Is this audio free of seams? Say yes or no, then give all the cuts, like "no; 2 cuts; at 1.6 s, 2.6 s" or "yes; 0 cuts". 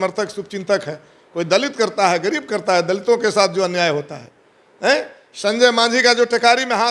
yes; 0 cuts